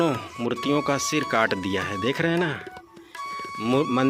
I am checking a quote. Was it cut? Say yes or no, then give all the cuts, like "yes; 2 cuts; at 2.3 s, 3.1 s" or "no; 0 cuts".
no; 0 cuts